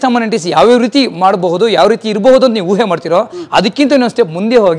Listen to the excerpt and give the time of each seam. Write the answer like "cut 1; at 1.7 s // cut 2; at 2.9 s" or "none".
none